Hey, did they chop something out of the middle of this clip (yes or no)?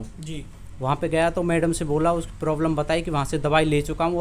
no